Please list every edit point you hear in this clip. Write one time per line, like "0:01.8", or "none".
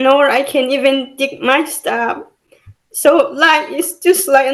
none